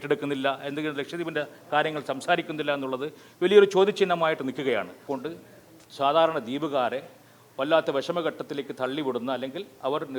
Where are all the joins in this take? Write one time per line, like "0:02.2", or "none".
0:05.0